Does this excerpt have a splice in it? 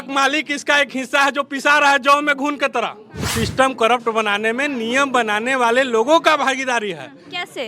yes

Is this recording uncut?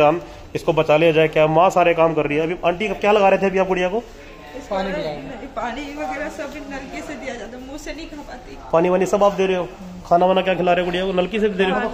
yes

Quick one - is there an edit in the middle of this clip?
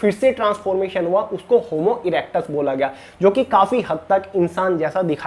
no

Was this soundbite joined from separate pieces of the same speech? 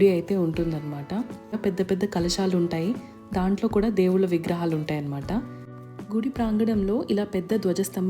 yes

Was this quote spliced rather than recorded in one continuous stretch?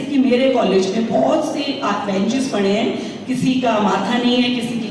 no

